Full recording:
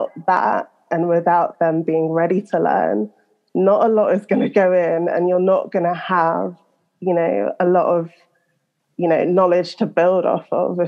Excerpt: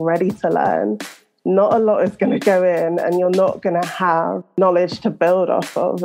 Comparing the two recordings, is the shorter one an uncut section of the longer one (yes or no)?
no